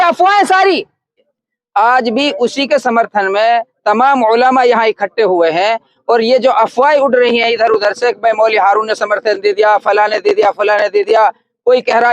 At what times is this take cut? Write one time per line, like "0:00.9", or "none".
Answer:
0:01.3